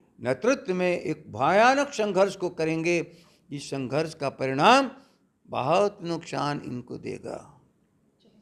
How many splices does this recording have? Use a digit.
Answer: 0